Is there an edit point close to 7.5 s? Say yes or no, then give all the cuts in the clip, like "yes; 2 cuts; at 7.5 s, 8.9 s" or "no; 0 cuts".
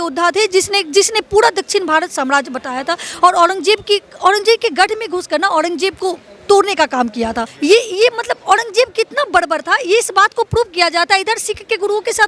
yes; 1 cut; at 7.5 s